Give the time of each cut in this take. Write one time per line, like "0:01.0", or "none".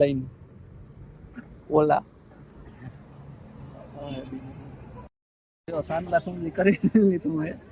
0:05.2

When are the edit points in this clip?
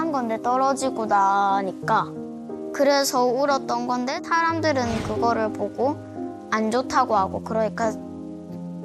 none

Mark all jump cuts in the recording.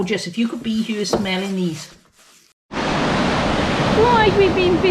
0:02.6

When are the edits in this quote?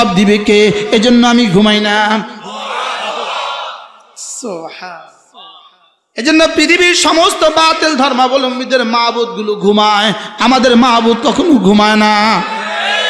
none

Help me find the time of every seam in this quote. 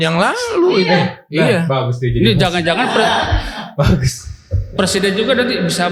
none

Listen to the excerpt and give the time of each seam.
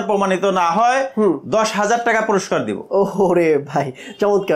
none

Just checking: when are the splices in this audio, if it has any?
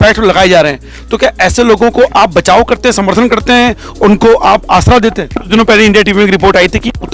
0:05.5

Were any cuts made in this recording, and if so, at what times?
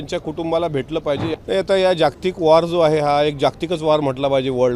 0:01.3

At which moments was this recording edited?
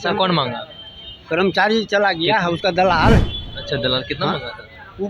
none

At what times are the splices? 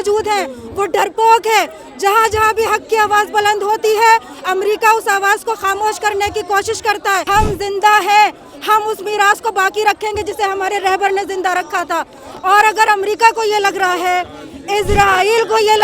0:07.2

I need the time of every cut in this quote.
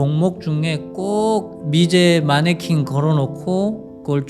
0:01.5

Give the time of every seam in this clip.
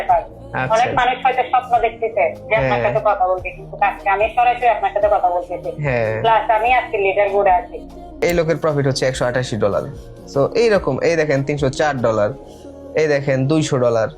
0:08.2

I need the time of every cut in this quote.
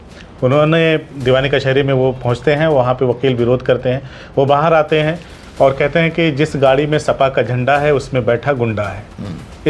0:01.1

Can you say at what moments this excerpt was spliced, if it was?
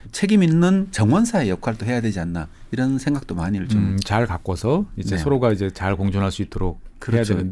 none

